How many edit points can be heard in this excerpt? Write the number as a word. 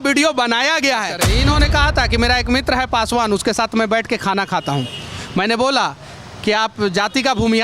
one